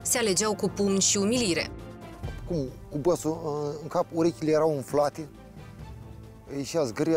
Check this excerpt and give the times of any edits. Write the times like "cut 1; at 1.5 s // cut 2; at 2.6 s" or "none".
cut 1; at 2.1 s